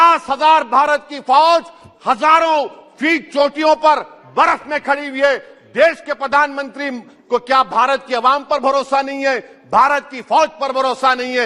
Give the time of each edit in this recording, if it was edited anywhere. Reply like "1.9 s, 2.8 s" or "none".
none